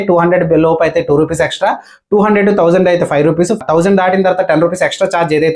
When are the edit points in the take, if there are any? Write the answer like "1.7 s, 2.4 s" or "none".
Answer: 3.6 s